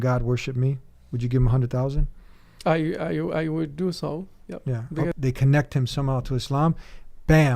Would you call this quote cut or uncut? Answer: cut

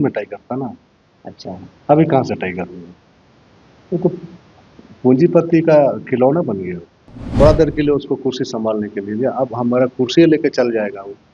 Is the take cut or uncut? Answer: cut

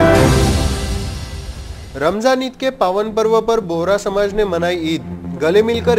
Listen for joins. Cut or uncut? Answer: uncut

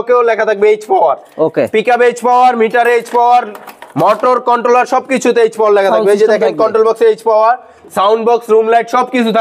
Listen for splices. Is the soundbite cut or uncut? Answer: uncut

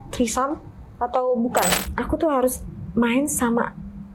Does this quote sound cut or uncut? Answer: cut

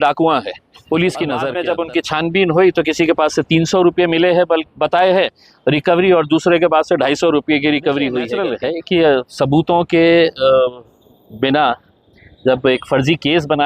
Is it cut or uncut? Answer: cut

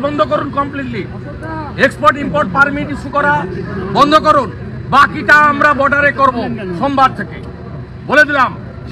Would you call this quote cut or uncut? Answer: uncut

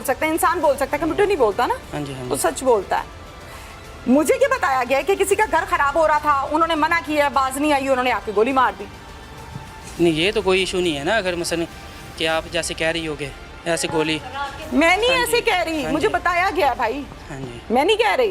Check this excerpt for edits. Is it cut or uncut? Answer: uncut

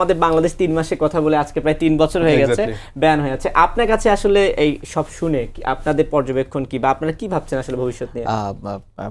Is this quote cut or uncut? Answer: uncut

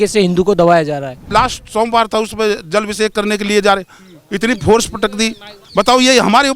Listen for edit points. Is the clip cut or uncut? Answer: cut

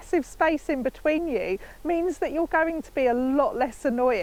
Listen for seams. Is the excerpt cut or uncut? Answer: uncut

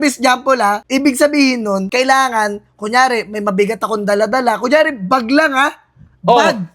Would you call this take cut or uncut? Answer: cut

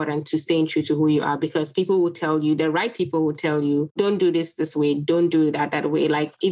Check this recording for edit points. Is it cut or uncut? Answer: cut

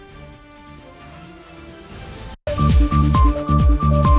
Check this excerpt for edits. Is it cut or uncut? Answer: cut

